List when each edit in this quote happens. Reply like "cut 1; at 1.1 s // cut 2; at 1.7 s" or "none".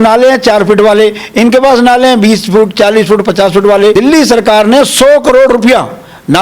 cut 1; at 3.9 s